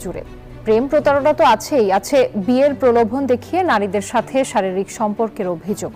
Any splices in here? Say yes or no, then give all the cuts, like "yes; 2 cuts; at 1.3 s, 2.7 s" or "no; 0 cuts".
no; 0 cuts